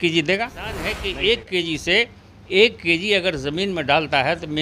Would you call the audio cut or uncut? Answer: cut